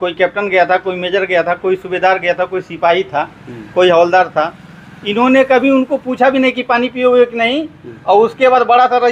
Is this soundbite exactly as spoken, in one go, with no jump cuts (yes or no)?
yes